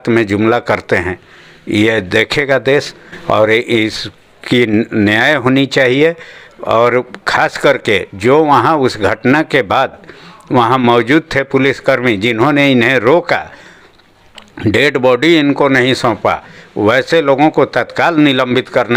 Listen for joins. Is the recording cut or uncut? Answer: uncut